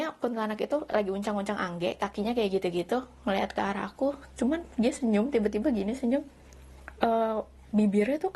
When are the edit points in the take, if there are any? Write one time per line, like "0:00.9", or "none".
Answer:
none